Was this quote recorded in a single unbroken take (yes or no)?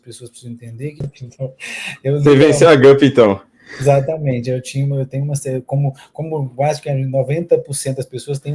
no